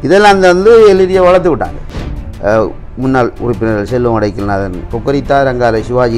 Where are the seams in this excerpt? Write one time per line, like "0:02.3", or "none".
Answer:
0:01.9